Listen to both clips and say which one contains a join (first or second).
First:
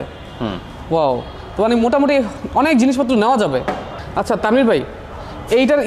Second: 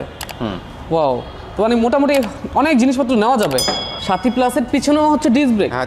second